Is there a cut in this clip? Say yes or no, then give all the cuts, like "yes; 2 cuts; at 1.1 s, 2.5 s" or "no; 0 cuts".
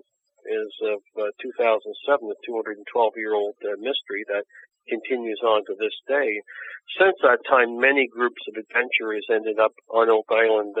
no; 0 cuts